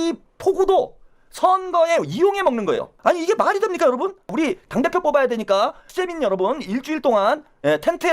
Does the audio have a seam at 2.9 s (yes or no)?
yes